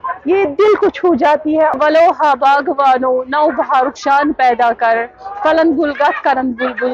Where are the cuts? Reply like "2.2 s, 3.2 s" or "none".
1.8 s